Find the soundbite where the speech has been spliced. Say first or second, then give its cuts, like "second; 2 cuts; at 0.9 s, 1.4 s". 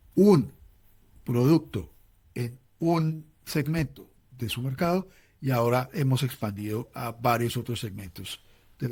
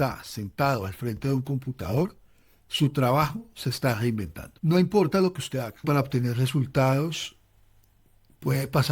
second; 2 cuts; at 5.8 s, 7.8 s